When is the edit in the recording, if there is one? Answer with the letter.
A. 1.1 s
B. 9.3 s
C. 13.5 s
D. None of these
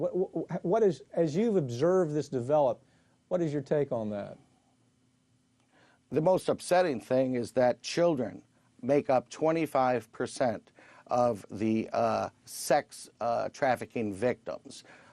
B